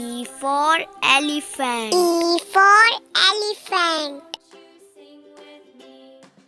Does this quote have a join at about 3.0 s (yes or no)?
no